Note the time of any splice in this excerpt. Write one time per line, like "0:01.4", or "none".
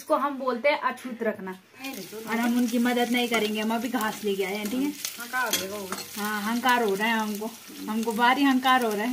0:01.9